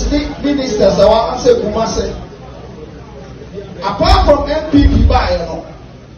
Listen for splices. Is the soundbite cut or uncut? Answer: uncut